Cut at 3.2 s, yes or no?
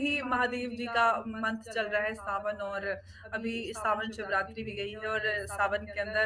no